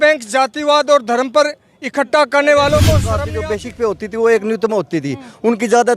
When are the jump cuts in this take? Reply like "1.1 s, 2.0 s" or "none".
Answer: 3.1 s